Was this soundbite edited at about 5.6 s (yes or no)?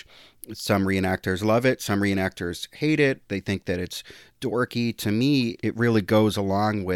yes